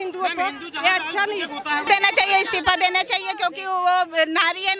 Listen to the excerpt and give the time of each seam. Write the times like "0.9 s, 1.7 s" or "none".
1.9 s

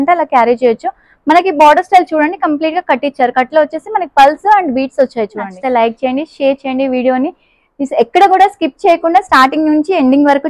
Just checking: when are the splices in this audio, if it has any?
5.5 s

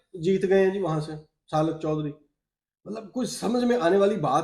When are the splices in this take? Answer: none

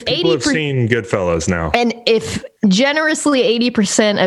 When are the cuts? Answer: 2.4 s

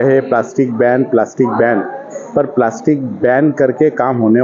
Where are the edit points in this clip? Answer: none

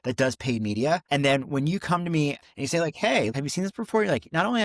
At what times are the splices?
1.0 s, 2.4 s, 3.3 s

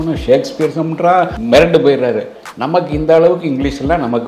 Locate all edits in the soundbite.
1.4 s

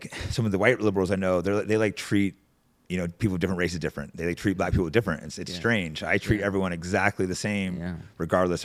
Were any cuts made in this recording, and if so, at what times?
none

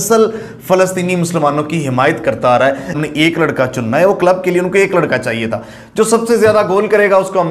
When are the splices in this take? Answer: 3.0 s

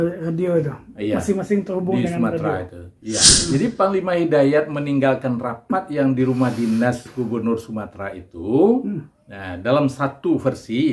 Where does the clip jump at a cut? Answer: 3.3 s

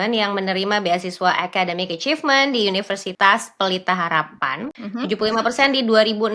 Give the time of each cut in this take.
3.1 s, 4.8 s

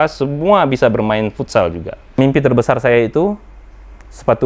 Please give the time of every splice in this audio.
2.2 s

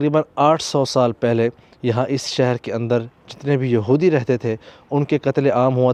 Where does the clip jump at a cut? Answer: none

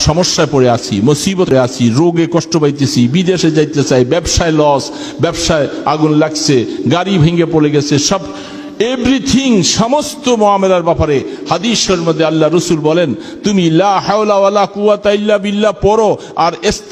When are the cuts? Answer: 1.5 s

